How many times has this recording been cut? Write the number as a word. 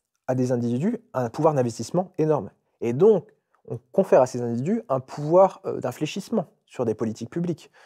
zero